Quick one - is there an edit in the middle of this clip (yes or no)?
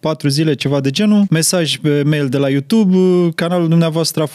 yes